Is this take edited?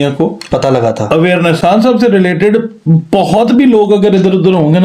yes; 1 cut; at 1.6 s

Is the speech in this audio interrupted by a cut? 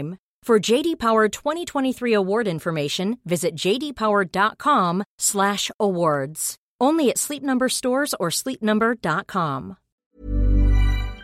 yes; 1 cut; at 10.1 s

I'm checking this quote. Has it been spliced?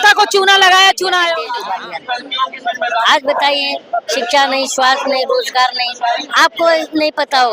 yes; 1 cut; at 1.6 s

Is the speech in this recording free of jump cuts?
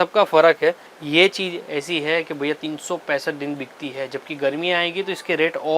no; 1 cut; at 0.9 s

